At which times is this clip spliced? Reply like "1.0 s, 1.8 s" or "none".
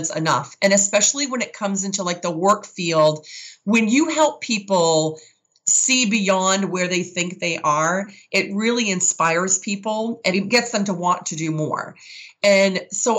10.3 s

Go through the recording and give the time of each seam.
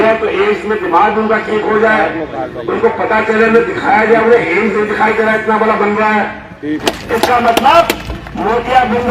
6.8 s

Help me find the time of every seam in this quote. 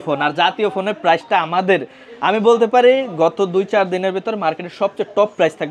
none

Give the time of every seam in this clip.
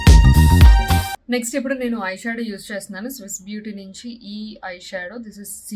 1.2 s

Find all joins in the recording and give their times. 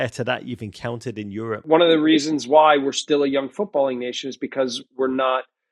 1.5 s

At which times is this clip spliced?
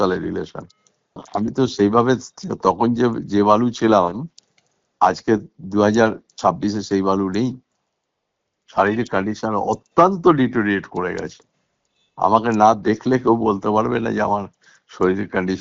1.2 s

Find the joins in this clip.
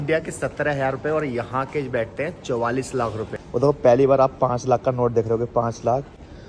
3.3 s

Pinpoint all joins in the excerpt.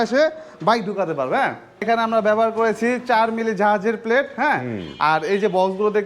1.8 s

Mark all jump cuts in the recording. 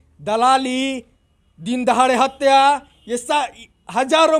none

